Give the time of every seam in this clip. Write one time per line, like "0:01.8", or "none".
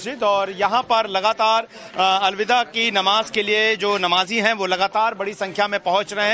0:02.8